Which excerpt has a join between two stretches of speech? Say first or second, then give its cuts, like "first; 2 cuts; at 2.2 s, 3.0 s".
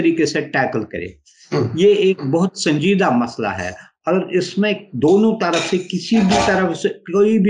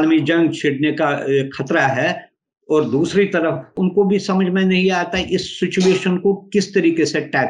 second; 1 cut; at 3.7 s